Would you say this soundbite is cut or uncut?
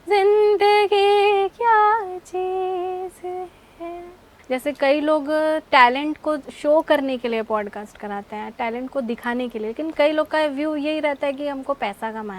cut